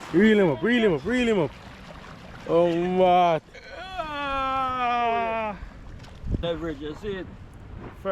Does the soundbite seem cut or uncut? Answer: cut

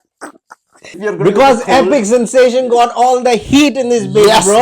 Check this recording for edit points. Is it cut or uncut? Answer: cut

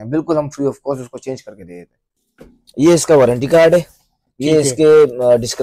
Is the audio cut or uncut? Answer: cut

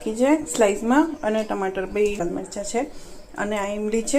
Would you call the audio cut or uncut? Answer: cut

